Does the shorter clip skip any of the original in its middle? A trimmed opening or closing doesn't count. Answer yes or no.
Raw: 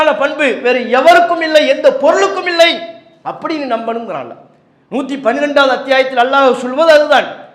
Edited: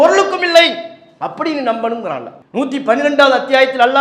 yes